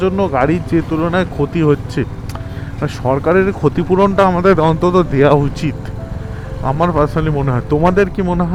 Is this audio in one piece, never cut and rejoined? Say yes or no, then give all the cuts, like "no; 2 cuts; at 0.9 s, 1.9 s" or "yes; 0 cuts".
yes; 0 cuts